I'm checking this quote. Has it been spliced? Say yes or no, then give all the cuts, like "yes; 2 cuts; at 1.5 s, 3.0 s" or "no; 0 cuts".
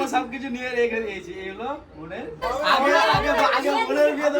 yes; 1 cut; at 2.4 s